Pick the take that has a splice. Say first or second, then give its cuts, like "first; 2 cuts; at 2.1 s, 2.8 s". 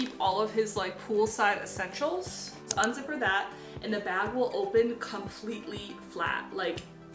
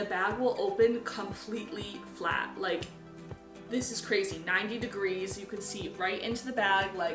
first; 1 cut; at 2.6 s